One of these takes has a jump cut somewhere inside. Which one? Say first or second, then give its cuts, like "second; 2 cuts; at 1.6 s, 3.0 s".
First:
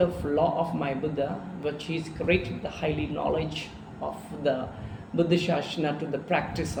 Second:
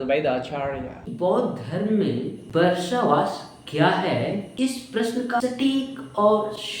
second; 4 cuts; at 1.0 s, 2.4 s, 4.5 s, 5.4 s